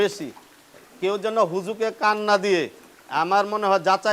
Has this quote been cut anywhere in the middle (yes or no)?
no